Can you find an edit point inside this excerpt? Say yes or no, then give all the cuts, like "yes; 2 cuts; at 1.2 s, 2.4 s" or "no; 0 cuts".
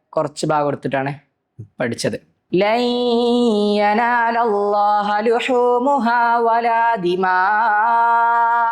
yes; 1 cut; at 2.3 s